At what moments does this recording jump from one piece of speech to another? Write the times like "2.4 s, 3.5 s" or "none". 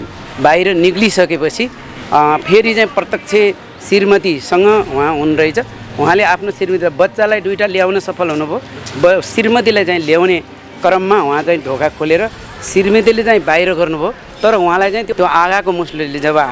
14.3 s, 15.1 s